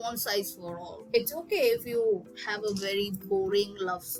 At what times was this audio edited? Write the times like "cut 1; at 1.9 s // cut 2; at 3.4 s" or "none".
none